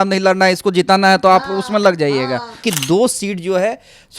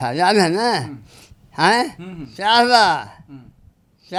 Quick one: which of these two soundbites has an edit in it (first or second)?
first